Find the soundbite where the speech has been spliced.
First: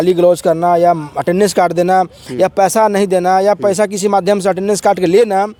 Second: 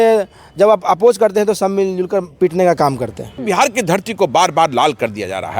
second; 1 cut; at 3.4 s

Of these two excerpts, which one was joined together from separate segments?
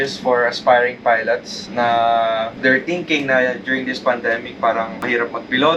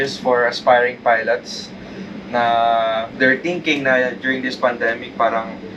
first; 2 cuts; at 1.6 s, 5.0 s

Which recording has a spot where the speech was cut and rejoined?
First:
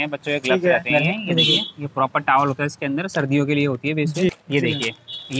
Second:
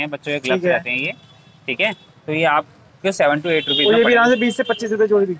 first; 2 cuts; at 0.9 s, 4.4 s

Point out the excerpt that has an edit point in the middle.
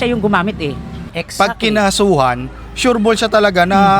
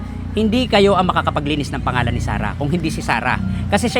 first; 1 cut; at 1.1 s

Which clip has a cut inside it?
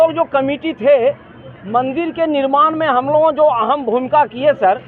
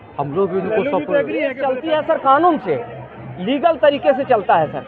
second; 1 cut; at 1.6 s

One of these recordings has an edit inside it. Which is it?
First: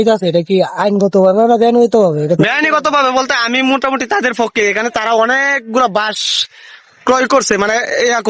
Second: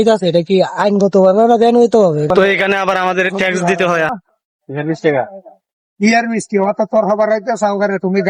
second; 2 cuts; at 2.3 s, 4.1 s

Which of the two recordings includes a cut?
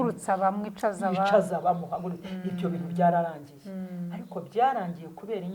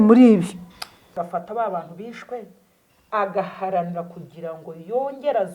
second; 1 cut; at 1.1 s

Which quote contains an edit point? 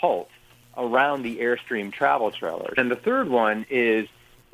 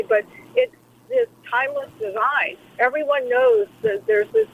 first; 1 cut; at 2.8 s

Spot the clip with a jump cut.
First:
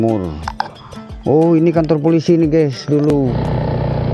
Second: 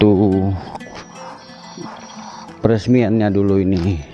first; 1 cut; at 3.1 s

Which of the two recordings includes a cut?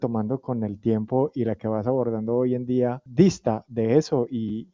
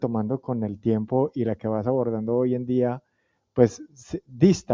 first; 1 cut; at 3.0 s

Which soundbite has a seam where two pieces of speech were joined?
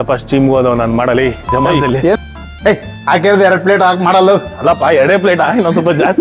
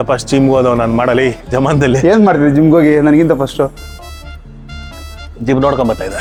first; 1 cut; at 2.2 s

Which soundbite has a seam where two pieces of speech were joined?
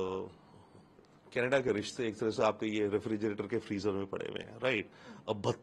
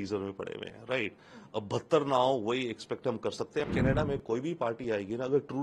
second; 1 cut; at 3.7 s

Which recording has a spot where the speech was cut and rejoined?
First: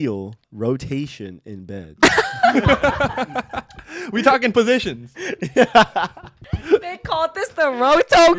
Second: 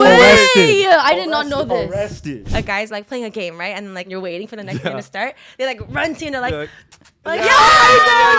second; 2 cuts; at 2.4 s, 4.1 s

